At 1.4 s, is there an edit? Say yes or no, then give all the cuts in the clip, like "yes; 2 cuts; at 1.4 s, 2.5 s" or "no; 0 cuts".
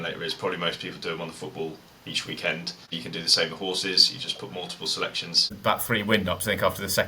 no; 2 cuts; at 2.9 s, 5.5 s